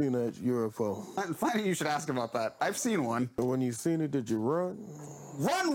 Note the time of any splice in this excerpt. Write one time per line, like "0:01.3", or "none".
0:01.2
0:03.3